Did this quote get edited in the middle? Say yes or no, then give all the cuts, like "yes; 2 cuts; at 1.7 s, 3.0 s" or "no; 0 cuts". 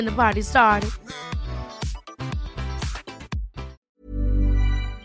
yes; 1 cut; at 4.0 s